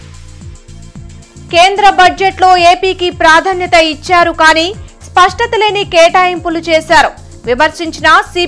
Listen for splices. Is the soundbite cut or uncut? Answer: cut